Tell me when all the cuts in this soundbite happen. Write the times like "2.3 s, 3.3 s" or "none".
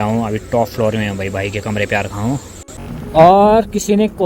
2.8 s